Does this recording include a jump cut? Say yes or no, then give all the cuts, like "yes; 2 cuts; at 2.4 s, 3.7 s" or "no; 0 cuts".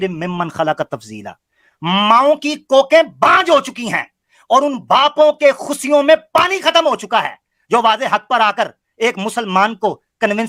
no; 0 cuts